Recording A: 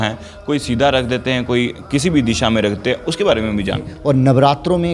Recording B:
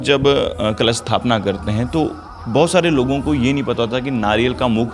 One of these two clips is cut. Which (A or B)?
A